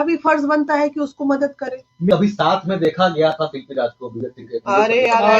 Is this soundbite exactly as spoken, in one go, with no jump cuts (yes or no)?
no